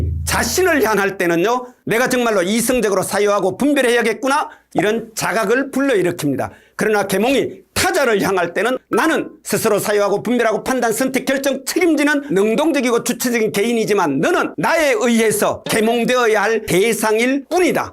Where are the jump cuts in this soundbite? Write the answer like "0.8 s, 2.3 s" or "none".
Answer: 4.6 s, 8.8 s